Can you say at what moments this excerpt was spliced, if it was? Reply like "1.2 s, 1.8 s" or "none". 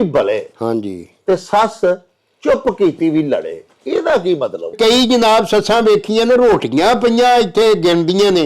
4.7 s